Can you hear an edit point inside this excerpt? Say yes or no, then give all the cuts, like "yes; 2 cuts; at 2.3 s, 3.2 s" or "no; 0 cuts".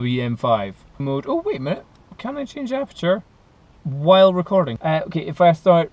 yes; 2 cuts; at 1.0 s, 4.7 s